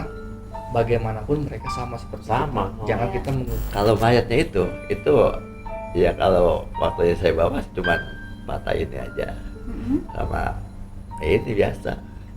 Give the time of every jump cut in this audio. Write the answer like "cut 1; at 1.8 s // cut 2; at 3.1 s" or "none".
cut 1; at 3.6 s